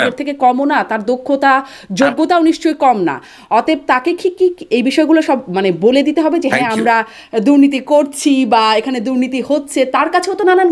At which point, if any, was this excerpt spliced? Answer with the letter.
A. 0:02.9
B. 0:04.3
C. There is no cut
C